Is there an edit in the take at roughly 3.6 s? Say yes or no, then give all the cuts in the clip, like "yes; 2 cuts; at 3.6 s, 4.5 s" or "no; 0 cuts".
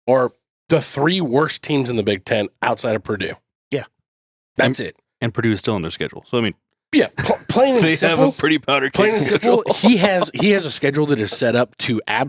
no; 0 cuts